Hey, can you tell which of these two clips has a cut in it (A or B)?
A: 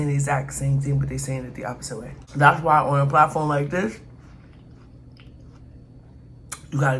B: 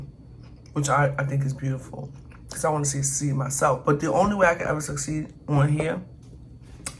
A